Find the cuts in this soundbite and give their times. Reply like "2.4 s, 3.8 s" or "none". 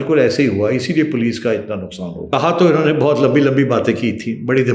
2.3 s